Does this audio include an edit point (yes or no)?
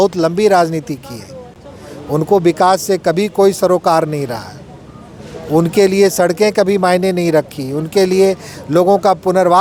no